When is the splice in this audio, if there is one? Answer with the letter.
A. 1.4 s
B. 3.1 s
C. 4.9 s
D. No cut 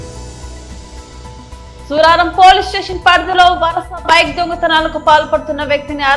A